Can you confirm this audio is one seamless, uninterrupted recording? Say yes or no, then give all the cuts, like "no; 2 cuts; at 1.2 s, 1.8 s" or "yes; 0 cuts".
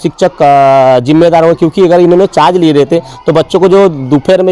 yes; 0 cuts